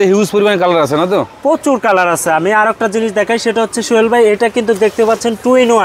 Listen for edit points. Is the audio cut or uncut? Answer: uncut